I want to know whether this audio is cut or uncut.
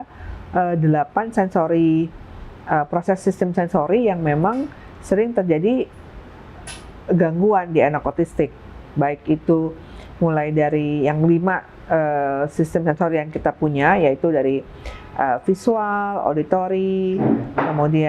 uncut